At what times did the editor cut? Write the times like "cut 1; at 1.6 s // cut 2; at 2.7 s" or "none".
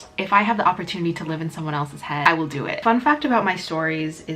cut 1; at 2.8 s

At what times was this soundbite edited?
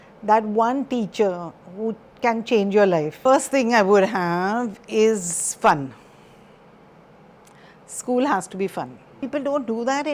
cut 1; at 3.1 s // cut 2; at 9.2 s

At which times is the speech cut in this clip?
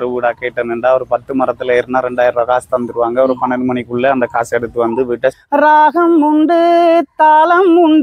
cut 1; at 5.4 s

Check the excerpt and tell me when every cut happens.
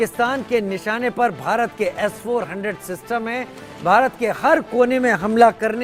none

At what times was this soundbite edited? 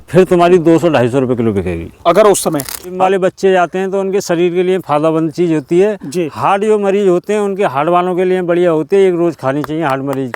cut 1; at 3.0 s

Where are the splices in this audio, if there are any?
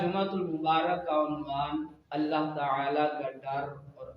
cut 1; at 2.0 s

